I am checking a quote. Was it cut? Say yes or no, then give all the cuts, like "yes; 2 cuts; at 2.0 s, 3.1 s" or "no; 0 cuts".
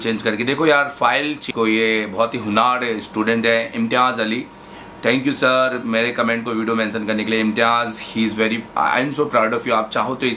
yes; 1 cut; at 1.5 s